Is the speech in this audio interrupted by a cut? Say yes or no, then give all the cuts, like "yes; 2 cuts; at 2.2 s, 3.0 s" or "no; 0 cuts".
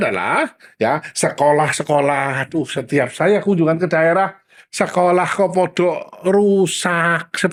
no; 0 cuts